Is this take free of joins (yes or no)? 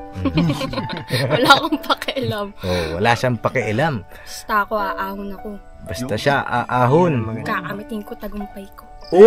yes